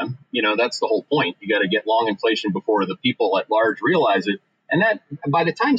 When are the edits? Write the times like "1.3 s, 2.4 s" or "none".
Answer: none